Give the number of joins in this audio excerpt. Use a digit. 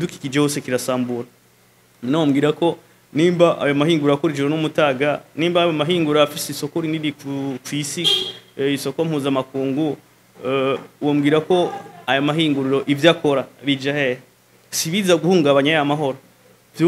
0